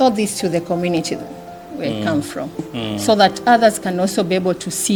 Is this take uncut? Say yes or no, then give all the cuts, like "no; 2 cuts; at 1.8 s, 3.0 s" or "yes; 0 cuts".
yes; 0 cuts